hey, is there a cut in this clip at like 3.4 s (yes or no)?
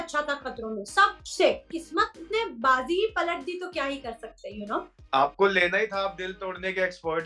no